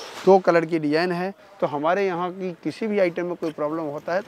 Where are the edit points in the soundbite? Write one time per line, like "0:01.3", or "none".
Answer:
0:01.4